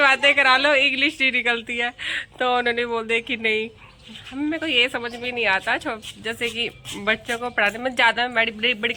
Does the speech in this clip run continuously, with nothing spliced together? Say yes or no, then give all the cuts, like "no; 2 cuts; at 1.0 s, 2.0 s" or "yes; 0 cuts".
yes; 0 cuts